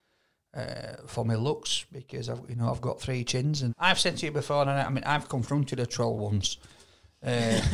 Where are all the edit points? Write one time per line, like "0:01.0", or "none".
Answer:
0:03.7